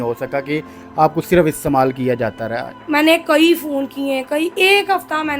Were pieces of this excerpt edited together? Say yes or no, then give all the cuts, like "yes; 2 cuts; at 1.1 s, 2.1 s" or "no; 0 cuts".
yes; 1 cut; at 2.7 s